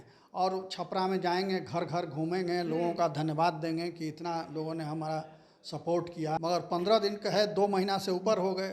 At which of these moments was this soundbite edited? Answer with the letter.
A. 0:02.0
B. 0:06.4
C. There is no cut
B